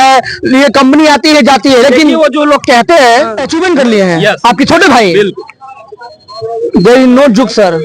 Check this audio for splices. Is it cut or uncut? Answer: cut